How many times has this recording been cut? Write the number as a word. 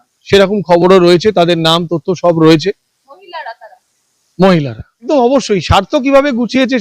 one